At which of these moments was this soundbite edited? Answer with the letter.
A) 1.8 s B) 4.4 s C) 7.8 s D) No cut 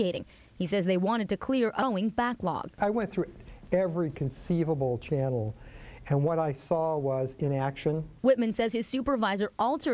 A